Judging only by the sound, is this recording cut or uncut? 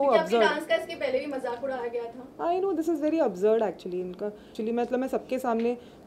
cut